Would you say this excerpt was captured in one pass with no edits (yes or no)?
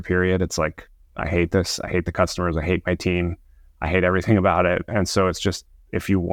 yes